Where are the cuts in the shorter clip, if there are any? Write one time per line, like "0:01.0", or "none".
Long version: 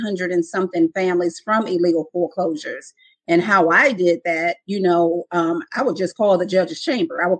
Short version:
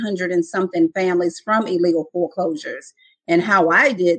none